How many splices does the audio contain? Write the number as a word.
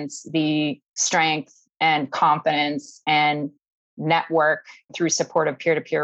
one